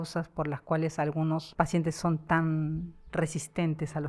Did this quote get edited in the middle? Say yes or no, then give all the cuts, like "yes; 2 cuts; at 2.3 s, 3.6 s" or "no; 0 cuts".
yes; 1 cut; at 1.5 s